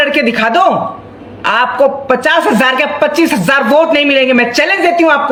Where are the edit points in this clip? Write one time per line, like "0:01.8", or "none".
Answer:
none